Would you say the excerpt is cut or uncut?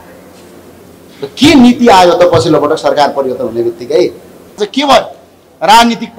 cut